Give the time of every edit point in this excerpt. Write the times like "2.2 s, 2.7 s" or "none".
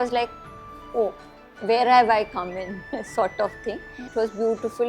4.0 s